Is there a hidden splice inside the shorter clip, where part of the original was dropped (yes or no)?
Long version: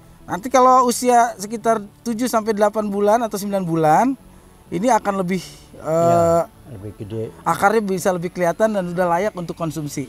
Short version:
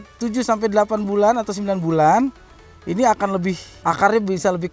yes